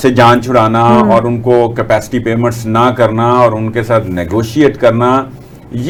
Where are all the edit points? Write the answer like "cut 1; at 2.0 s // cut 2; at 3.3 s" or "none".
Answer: none